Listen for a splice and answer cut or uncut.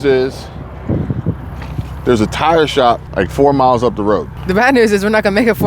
cut